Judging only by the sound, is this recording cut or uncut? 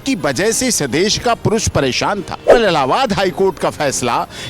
cut